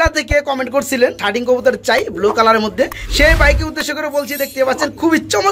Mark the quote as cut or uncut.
cut